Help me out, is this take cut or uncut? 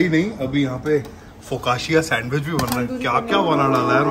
uncut